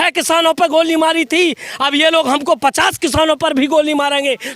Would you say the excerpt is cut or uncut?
uncut